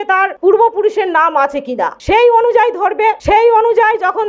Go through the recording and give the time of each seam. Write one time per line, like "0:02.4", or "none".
none